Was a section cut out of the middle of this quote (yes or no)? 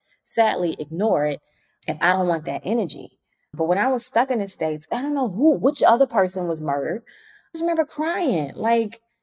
yes